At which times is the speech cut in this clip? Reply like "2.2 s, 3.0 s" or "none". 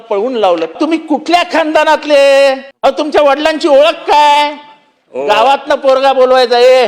0.7 s, 2.7 s

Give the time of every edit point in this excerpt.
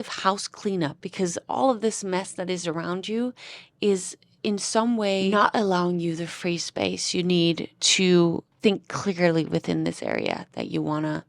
1.0 s, 5.3 s, 8.5 s

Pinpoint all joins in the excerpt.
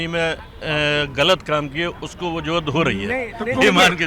none

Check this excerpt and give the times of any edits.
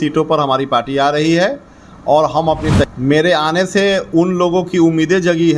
2.8 s

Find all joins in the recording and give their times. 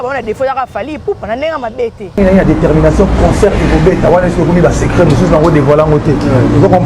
2.0 s

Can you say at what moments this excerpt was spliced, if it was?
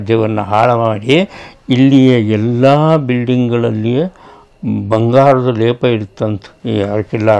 6.5 s

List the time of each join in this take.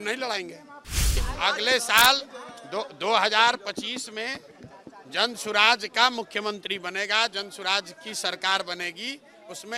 1.2 s

